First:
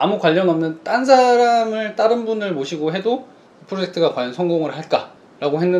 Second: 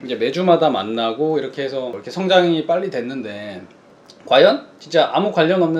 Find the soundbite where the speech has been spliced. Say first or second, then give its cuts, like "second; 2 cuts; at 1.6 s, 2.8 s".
second; 1 cut; at 2.0 s